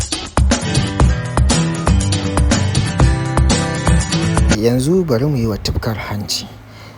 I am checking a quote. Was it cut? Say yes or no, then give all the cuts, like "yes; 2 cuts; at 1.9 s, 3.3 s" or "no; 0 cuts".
yes; 1 cut; at 4.4 s